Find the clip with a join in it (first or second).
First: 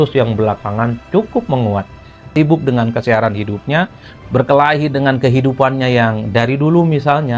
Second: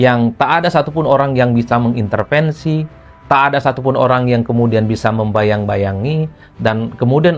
first